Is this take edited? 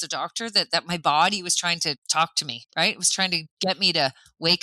yes; 2 cuts; at 2.0 s, 3.5 s

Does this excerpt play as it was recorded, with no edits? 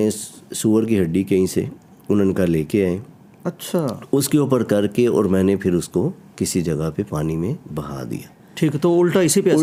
yes; 0 cuts

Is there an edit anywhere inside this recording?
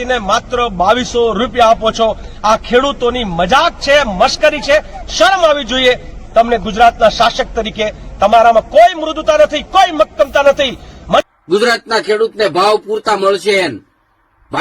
yes; 1 cut; at 11.2 s

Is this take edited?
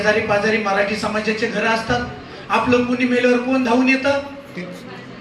no; 0 cuts

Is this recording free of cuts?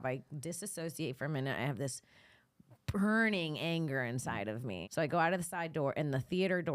no; 1 cut; at 4.8 s

